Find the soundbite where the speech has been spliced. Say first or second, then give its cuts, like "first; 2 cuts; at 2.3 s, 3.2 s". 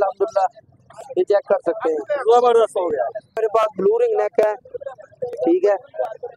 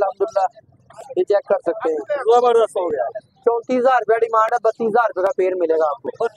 first; 1 cut; at 3.4 s